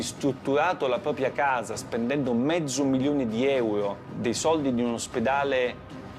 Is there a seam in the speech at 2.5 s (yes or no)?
no